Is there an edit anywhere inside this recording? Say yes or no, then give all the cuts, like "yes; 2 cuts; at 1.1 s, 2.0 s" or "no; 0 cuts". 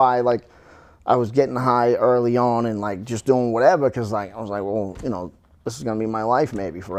no; 0 cuts